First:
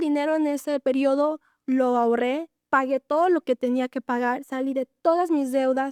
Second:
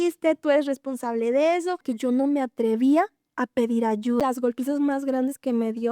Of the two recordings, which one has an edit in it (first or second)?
second